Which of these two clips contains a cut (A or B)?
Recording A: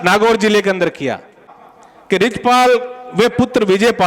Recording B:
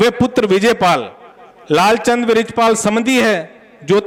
A